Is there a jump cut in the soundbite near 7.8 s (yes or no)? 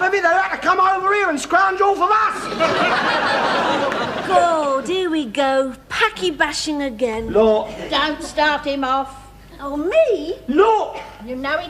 no